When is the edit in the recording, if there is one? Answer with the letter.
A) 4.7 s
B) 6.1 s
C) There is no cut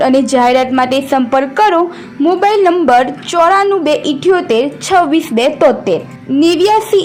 C